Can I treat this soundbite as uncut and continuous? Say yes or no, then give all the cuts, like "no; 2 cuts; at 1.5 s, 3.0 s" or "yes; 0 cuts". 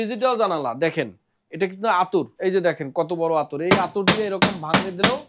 no; 1 cut; at 2.3 s